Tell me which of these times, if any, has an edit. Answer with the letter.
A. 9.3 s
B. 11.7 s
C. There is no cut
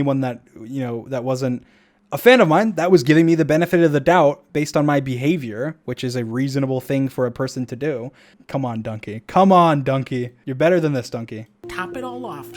B